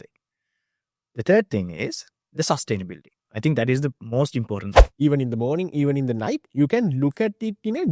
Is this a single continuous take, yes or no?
no